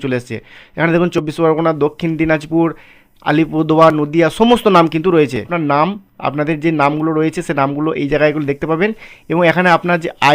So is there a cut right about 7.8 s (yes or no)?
no